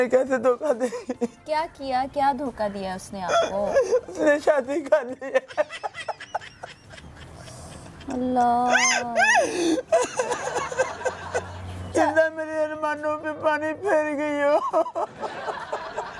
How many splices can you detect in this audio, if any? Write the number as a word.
zero